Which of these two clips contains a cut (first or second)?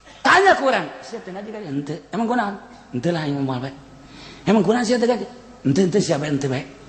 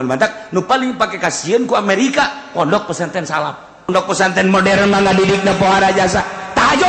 second